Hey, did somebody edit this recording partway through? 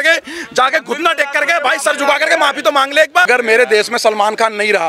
yes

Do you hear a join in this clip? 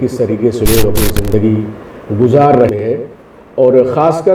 yes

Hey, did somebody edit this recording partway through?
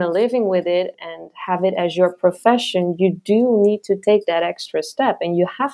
no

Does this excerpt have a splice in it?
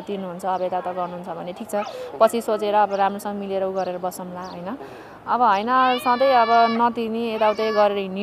no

